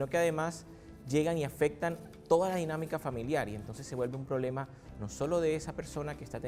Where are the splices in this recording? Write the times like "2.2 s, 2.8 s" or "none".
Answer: none